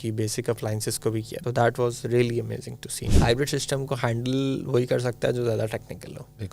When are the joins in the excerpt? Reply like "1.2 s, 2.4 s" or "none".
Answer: 1.3 s, 3.1 s